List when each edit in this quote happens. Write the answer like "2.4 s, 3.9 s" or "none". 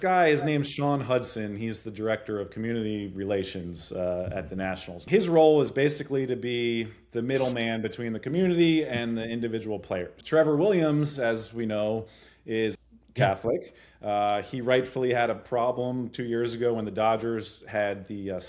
5.0 s, 10.2 s, 12.9 s